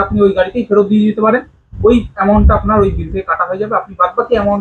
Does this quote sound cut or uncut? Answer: uncut